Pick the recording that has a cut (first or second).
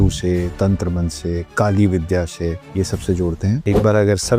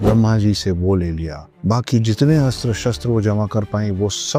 first